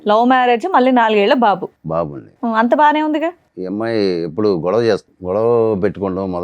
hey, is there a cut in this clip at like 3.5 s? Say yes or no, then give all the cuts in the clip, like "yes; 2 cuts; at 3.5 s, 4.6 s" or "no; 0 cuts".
yes; 2 cuts; at 3.5 s, 5.1 s